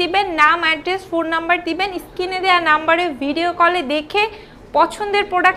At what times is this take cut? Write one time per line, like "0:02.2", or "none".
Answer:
none